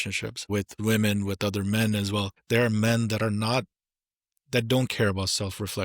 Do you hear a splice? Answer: yes; 2 cuts; at 0.8 s, 2.3 s

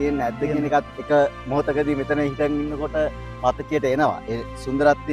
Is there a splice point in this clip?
no; 0 cuts

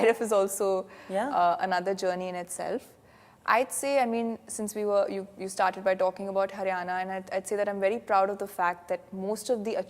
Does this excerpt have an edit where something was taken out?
no; 0 cuts

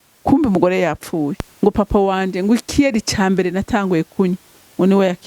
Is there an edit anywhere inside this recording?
yes; 1 cut; at 1.4 s

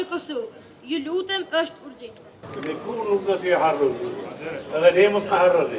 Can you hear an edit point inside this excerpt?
yes; 1 cut; at 2.5 s

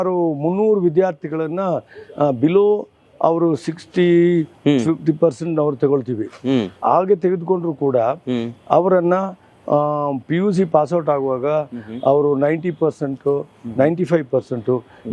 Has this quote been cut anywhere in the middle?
no; 0 cuts

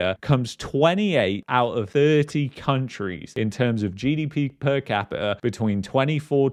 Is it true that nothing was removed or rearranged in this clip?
yes; 0 cuts

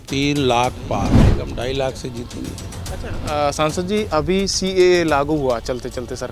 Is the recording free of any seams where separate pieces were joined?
no; 1 cut; at 1.2 s

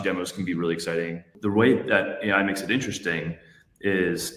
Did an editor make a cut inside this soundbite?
yes; 1 cut; at 1.3 s

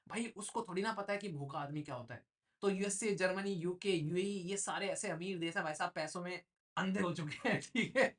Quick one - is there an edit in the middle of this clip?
no; 0 cuts

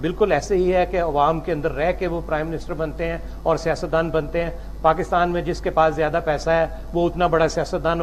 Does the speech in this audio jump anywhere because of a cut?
no; 0 cuts

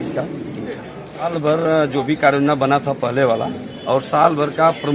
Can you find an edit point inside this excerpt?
yes; 1 cut; at 1.3 s

